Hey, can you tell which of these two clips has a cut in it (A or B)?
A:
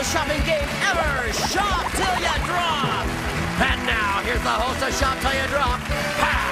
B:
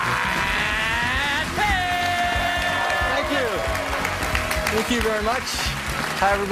B